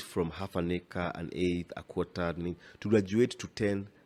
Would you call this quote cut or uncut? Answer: uncut